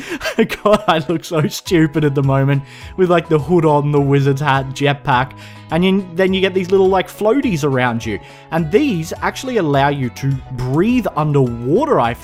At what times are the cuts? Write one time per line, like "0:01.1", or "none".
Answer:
none